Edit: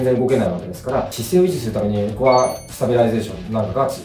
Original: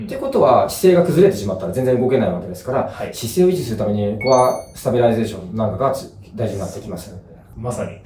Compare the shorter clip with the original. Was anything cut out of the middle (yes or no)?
yes